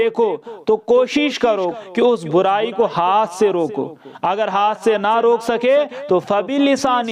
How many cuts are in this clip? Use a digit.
1